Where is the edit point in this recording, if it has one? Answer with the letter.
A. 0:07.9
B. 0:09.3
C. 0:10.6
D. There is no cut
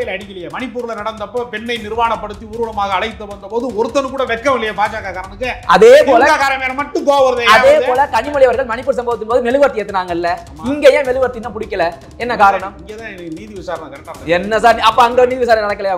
D